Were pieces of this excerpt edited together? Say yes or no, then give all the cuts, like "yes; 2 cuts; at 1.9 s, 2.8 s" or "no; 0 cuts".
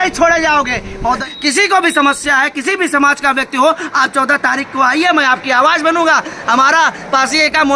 yes; 1 cut; at 1.3 s